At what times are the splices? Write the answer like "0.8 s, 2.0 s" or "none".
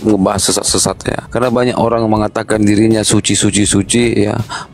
1.2 s

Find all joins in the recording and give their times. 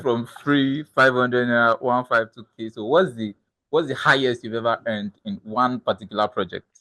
none

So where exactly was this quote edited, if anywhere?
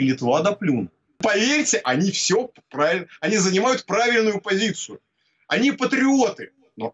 1.2 s

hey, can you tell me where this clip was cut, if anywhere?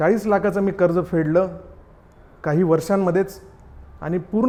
none

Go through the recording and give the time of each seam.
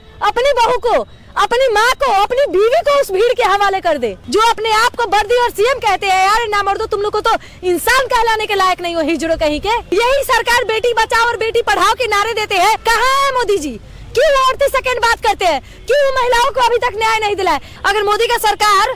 4.2 s, 9.8 s, 12.8 s, 17.7 s

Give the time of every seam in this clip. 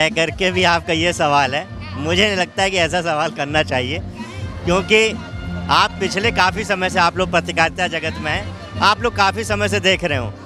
none

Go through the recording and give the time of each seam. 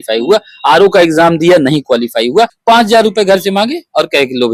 2.6 s

